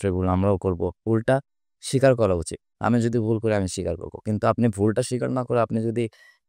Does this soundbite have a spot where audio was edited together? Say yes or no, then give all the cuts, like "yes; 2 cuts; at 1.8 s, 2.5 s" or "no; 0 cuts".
yes; 1 cut; at 1.0 s